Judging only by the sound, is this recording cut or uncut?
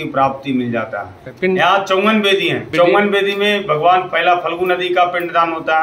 cut